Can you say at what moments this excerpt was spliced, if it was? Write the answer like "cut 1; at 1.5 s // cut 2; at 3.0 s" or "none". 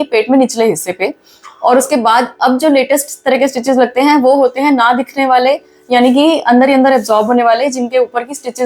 none

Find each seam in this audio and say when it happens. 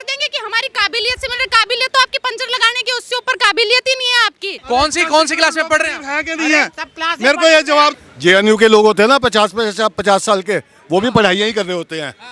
cut 1; at 4.5 s // cut 2; at 7.9 s

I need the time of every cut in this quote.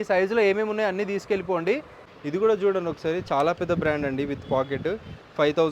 cut 1; at 2.0 s

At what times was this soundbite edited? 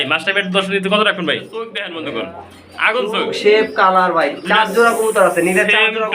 cut 1; at 1.8 s

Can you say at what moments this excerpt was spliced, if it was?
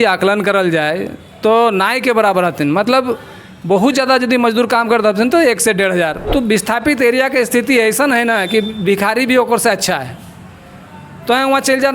cut 1; at 6.2 s

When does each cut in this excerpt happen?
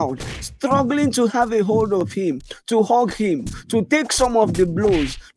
none

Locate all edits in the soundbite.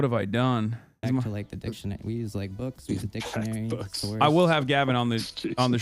cut 1; at 0.9 s

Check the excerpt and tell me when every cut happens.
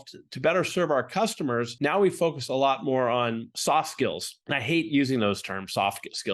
cut 1; at 1.7 s // cut 2; at 3.5 s // cut 3; at 4.3 s

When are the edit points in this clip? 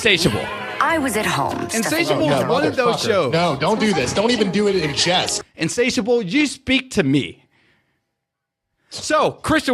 cut 1; at 5.4 s

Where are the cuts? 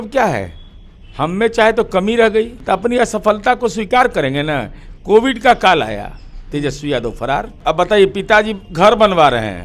cut 1; at 2.6 s // cut 2; at 7.6 s

